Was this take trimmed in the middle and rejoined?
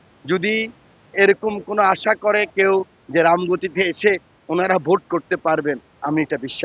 no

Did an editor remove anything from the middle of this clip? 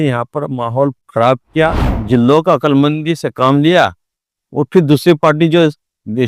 yes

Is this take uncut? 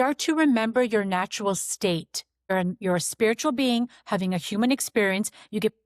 no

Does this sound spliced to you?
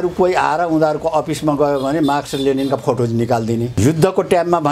yes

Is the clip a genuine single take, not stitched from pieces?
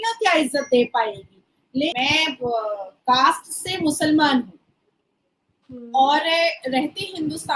no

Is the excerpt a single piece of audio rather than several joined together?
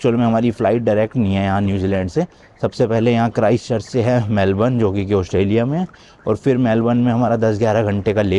yes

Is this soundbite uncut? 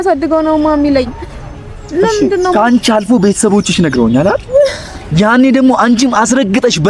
yes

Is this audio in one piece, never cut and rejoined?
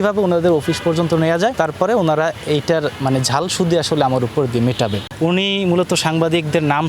no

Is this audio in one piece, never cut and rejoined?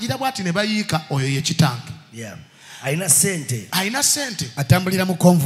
yes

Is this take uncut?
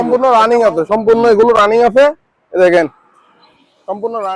yes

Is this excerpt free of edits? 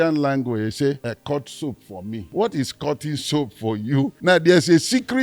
no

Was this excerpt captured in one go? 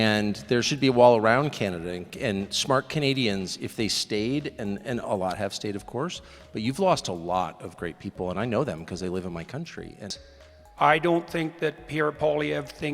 no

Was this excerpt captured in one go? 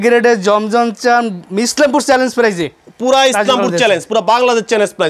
yes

